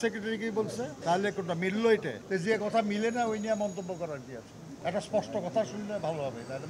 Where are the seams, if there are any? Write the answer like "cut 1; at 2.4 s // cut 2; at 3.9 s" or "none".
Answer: cut 1; at 1.0 s // cut 2; at 2.2 s // cut 3; at 4.6 s

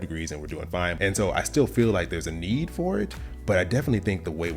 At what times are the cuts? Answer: cut 1; at 0.9 s

